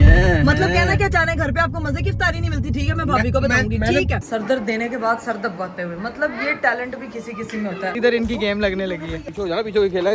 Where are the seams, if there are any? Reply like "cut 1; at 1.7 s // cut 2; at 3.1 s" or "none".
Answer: cut 1; at 4.2 s // cut 2; at 7.9 s